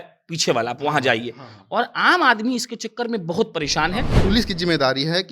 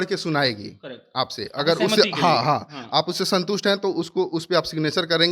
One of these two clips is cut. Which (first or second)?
first